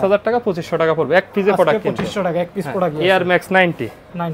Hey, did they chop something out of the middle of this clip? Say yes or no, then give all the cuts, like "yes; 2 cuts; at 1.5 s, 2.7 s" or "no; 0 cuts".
no; 0 cuts